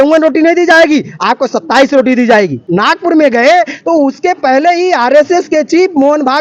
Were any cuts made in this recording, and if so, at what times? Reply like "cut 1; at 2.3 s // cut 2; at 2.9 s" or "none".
cut 1; at 2.7 s